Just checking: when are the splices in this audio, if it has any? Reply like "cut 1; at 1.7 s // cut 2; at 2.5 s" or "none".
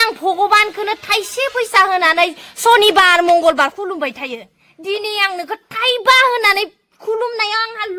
none